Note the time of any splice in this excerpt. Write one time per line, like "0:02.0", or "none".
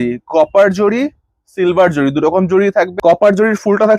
0:02.9